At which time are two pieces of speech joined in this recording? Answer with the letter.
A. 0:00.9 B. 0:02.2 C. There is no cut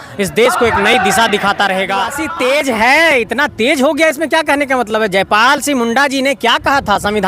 B